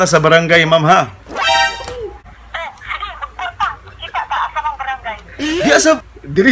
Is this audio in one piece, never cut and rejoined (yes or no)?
no